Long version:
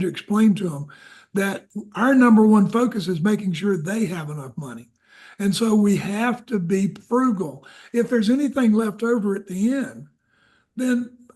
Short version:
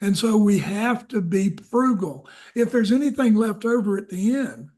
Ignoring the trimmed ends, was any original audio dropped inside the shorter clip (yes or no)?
no